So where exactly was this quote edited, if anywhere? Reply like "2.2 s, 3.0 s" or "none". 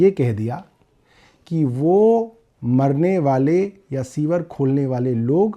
none